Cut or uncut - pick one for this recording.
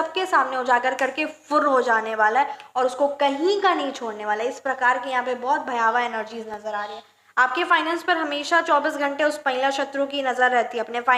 uncut